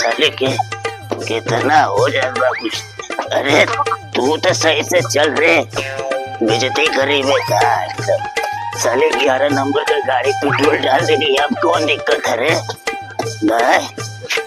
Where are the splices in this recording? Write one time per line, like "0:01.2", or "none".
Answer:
none